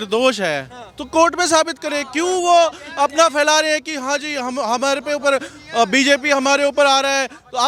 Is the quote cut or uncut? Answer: uncut